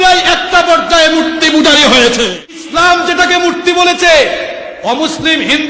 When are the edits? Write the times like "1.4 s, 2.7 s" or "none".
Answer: 2.6 s